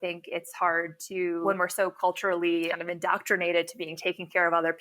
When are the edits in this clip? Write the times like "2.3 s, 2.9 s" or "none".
1.4 s

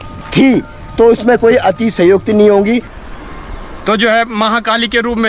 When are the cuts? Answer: 3.0 s

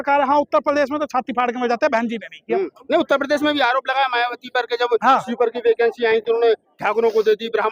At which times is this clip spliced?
none

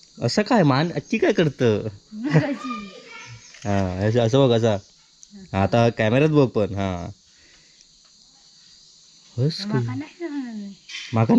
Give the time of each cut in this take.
none

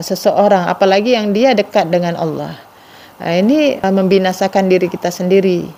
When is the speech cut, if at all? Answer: 3.8 s

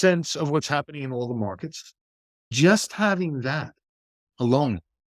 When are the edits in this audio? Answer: 2.5 s

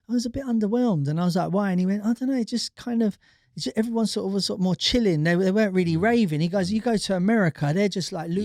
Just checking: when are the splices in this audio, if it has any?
none

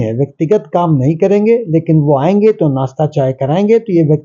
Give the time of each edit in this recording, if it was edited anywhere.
none

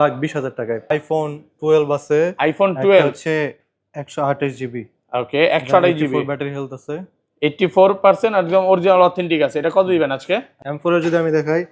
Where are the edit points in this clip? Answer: 0.9 s, 10.6 s

